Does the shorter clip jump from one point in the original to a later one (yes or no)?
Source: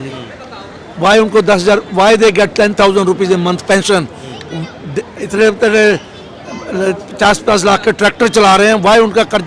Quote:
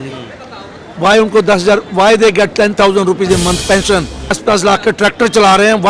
yes